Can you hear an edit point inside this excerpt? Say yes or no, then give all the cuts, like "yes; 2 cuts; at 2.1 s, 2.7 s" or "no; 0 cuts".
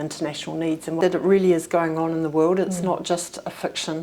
yes; 1 cut; at 1.0 s